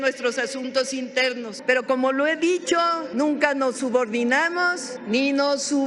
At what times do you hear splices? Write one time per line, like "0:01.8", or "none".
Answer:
0:01.5
0:03.0
0:04.9